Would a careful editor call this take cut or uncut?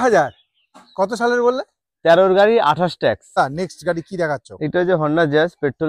cut